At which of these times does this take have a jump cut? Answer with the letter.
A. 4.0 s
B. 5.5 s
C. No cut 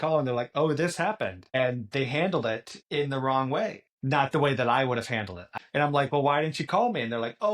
B